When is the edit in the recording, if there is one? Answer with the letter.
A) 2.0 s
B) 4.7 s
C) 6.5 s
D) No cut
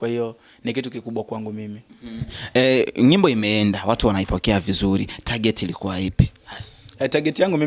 D